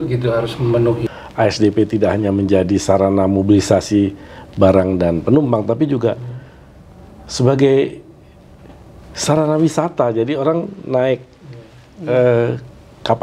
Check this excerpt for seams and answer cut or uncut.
cut